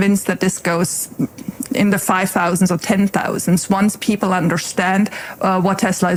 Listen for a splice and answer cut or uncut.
uncut